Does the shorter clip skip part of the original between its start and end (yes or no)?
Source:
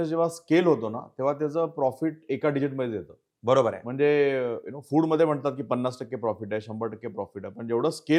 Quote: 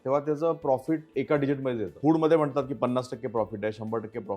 yes